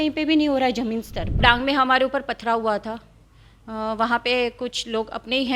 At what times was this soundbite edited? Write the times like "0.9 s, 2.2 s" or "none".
1.4 s